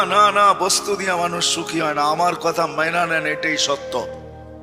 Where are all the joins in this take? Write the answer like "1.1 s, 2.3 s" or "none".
none